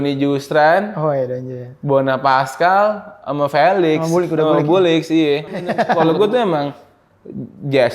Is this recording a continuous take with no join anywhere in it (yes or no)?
no